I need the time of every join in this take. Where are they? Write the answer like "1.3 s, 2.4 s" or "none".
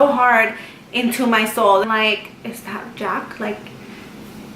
1.8 s